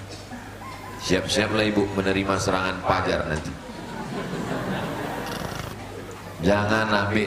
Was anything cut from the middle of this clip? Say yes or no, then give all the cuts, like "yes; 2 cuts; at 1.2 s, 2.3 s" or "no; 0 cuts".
yes; 1 cut; at 5.7 s